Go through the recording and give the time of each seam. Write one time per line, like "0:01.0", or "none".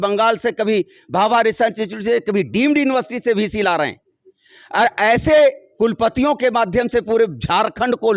none